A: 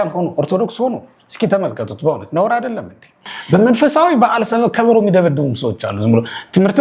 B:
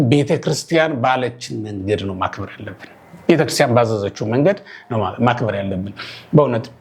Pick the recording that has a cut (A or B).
A